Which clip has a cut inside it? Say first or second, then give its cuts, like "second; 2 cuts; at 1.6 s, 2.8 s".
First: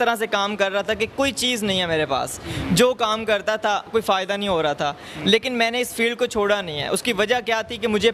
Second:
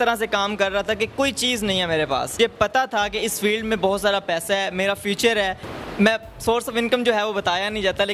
second; 2 cuts; at 2.4 s, 5.7 s